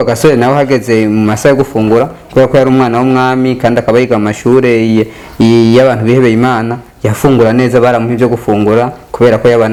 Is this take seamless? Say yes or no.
yes